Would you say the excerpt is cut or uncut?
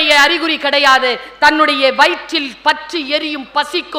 uncut